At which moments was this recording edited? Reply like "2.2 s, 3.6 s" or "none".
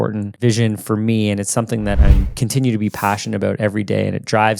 2.0 s